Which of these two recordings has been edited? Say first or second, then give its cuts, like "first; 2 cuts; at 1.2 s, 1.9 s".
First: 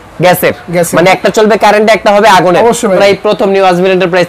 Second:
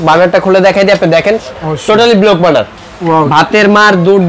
first; 1 cut; at 3.0 s